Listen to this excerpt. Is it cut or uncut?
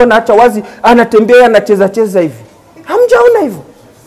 uncut